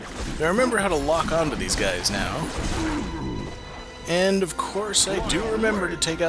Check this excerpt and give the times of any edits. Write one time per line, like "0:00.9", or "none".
0:05.0